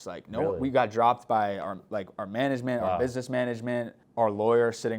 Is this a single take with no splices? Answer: no; 1 cut; at 4.0 s

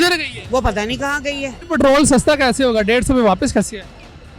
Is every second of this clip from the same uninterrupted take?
no; 1 cut; at 1.6 s

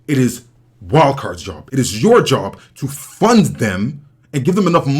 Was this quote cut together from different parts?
yes; 1 cut; at 1.5 s

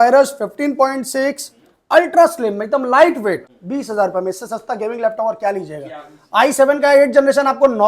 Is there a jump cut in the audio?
yes; 1 cut; at 3.5 s

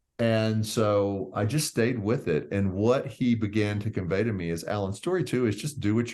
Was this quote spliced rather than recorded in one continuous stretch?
no; 0 cuts

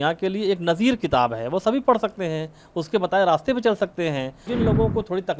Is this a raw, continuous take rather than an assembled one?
no; 1 cut; at 4.5 s

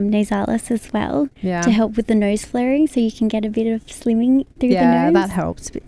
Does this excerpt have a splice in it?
no; 0 cuts

